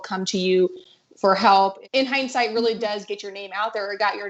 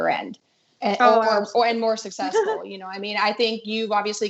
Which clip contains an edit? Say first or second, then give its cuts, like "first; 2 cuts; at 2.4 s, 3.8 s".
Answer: first; 1 cut; at 1.8 s